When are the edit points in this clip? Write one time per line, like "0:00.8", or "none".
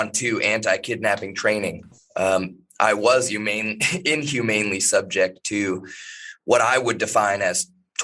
none